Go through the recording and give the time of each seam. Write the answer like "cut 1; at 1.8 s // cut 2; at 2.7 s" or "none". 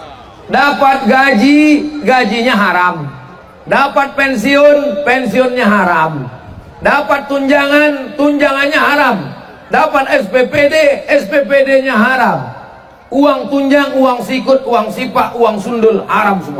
none